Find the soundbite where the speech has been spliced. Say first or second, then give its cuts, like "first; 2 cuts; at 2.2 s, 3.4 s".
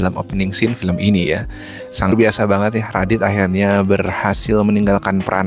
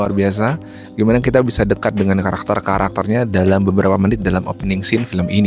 first; 1 cut; at 2.1 s